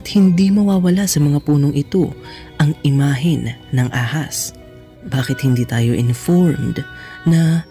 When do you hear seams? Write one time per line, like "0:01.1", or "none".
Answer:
0:05.1

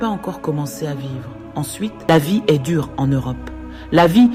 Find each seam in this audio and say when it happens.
0:02.1

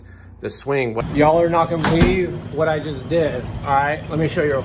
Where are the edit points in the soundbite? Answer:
0:01.0

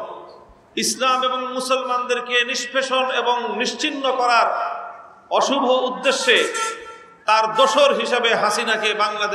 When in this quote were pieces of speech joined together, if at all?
none

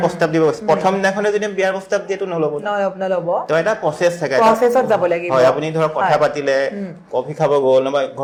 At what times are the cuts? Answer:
none

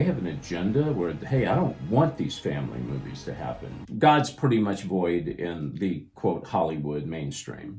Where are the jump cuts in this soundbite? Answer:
0:03.8

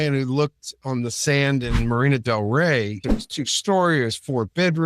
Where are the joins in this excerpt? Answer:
0:03.1

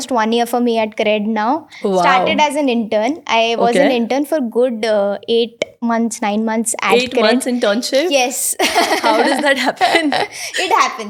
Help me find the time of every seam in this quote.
none

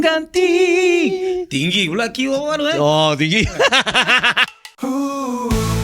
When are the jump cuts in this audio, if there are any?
0:04.4

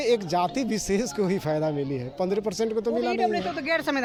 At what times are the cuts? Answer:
none

